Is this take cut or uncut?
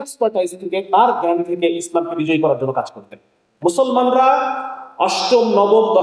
cut